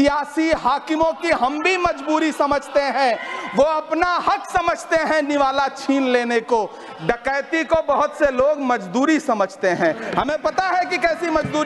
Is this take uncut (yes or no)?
yes